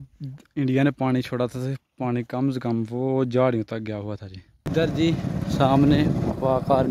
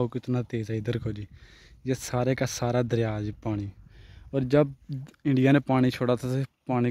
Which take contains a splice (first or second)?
first